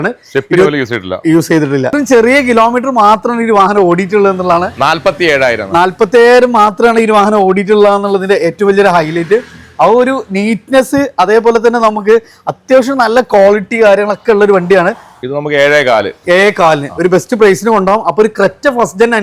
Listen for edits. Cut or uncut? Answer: cut